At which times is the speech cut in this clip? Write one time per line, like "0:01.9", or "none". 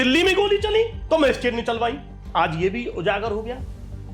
0:02.1